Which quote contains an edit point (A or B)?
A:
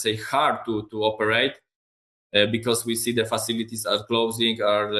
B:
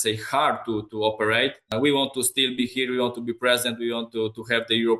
B